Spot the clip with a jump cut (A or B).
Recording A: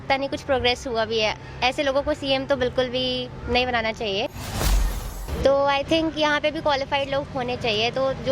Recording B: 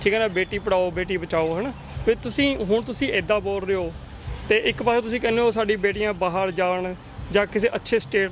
A